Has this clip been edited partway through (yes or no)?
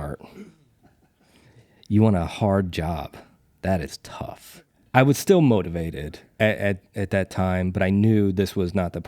yes